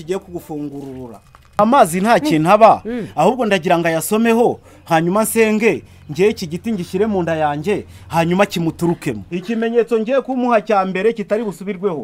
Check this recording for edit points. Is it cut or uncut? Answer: cut